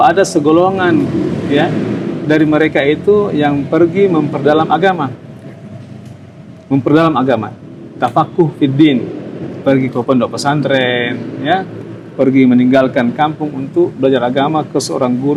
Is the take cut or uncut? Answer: uncut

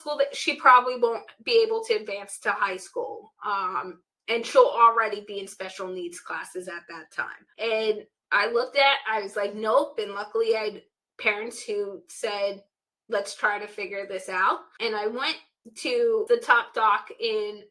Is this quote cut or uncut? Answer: cut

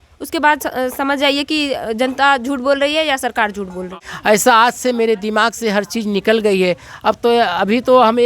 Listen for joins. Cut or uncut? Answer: cut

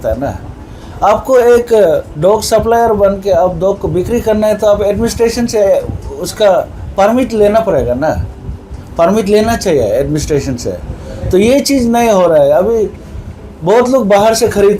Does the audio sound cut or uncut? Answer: uncut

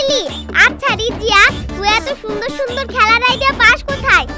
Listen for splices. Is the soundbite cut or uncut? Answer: uncut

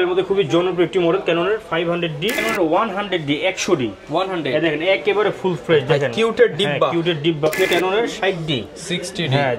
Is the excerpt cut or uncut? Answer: cut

